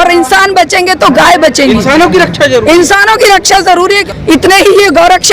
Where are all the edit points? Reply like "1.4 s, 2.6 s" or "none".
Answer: 4.1 s